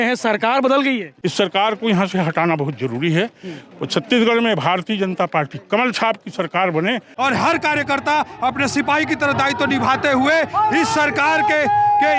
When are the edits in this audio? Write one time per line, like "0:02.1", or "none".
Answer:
0:01.1
0:07.1